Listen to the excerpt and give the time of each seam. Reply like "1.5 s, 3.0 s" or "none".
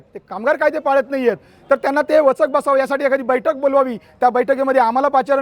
none